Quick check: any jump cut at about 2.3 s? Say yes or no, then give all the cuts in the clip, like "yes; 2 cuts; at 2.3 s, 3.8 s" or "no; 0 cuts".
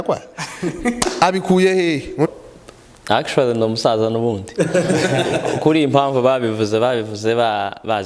yes; 1 cut; at 2.3 s